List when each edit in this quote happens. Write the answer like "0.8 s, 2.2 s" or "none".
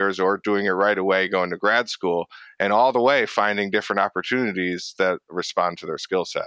none